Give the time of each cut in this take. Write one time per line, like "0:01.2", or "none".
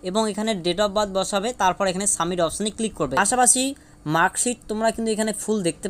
0:03.2